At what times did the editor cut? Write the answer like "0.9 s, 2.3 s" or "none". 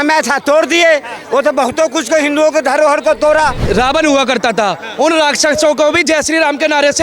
3.6 s